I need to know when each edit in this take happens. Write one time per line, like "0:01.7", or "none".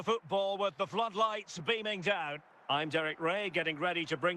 0:02.5